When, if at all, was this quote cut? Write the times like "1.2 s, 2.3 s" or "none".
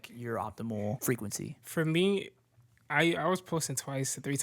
1.0 s